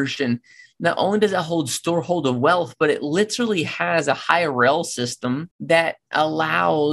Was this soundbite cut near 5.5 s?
yes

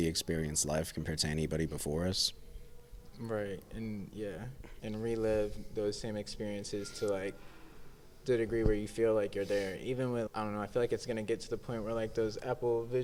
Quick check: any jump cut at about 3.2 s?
no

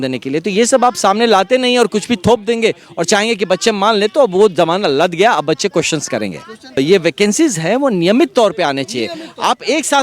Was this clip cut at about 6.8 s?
yes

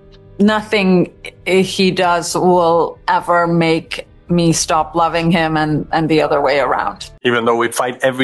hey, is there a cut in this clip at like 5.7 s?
no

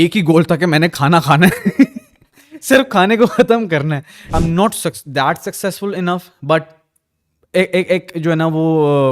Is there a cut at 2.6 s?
no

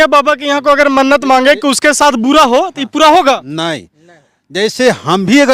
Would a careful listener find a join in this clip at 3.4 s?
no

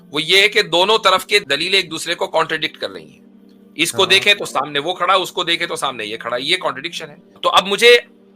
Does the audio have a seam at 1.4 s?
yes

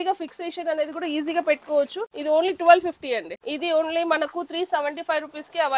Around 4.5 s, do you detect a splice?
no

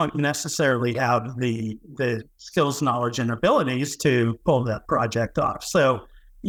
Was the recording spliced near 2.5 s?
no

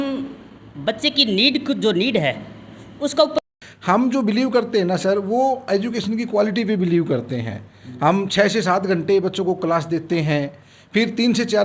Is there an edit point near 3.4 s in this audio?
yes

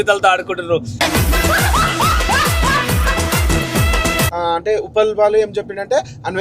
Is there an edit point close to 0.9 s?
yes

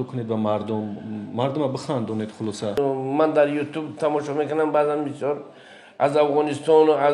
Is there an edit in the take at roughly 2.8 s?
yes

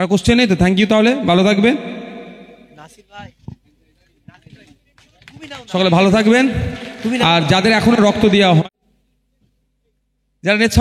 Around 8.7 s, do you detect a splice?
yes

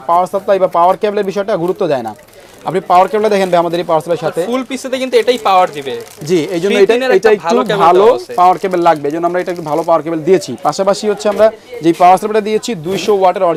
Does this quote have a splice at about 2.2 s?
no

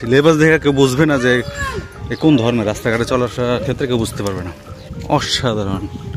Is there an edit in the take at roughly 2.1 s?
no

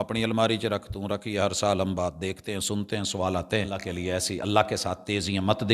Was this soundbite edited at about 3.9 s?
yes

